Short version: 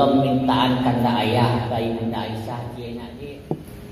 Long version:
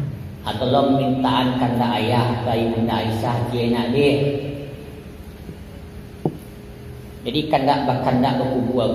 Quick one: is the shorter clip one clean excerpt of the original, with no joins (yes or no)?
no